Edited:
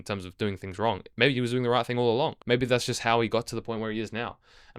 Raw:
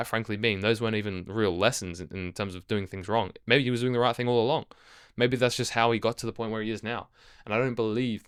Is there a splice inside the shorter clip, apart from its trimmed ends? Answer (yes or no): yes